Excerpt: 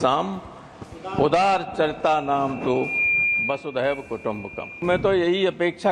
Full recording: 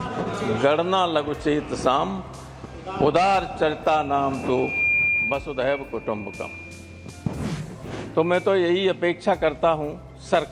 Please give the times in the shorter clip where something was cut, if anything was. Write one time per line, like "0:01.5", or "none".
0:04.8